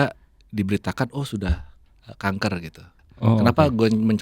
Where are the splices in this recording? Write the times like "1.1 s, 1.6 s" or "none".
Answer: 3.0 s